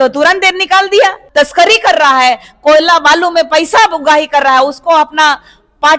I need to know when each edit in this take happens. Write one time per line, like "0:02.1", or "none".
0:01.2